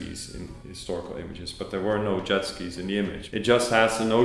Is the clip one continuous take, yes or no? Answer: no